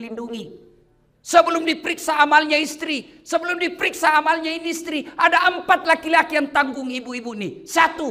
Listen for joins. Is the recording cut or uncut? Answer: uncut